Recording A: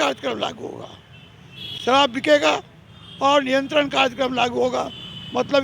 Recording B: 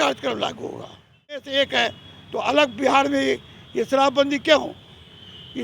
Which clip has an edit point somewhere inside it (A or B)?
B